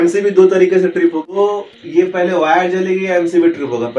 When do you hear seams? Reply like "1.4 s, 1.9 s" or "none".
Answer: 1.4 s